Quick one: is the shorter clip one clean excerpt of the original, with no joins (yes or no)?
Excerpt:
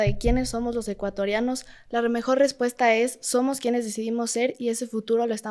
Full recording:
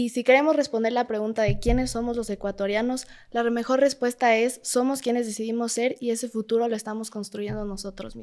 yes